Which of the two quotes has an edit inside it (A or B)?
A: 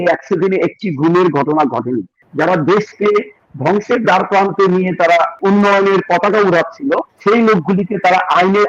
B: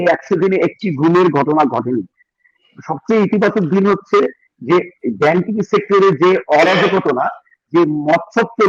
A